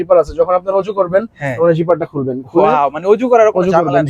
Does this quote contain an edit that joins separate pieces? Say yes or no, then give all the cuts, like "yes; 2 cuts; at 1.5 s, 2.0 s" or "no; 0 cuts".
no; 0 cuts